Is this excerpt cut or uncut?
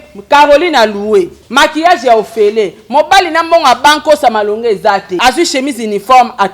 cut